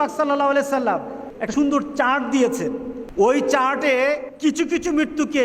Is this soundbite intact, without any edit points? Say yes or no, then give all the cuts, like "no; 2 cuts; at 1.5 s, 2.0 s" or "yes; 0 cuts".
no; 3 cuts; at 1.3 s, 3.0 s, 4.3 s